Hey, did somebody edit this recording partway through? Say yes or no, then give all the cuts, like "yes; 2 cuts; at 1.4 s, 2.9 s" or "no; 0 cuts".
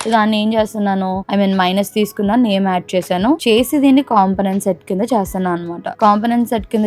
no; 0 cuts